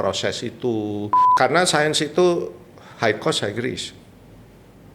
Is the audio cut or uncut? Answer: cut